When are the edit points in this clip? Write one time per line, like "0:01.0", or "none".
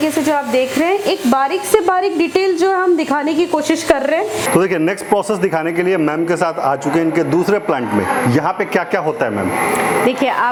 none

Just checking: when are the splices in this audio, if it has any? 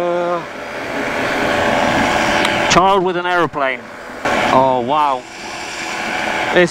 0:04.2

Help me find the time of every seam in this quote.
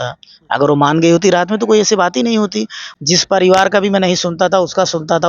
0:02.8

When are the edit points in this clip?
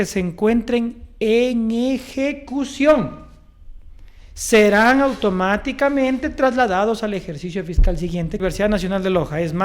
0:08.4

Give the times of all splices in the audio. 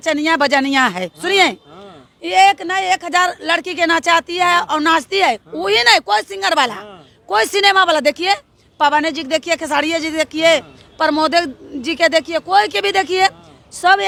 none

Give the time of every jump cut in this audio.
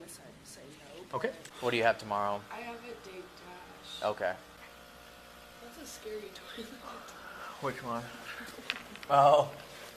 0:01.4
0:04.6

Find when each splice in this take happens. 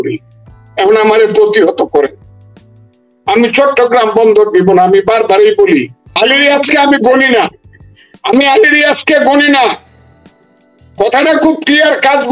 0:06.0

